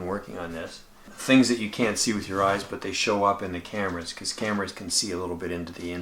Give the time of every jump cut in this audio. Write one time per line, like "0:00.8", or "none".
0:01.1